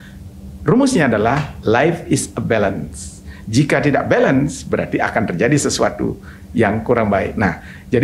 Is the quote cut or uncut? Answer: uncut